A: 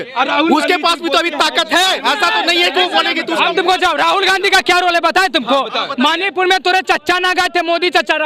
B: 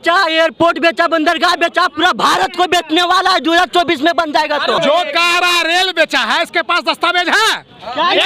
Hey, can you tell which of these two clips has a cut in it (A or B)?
B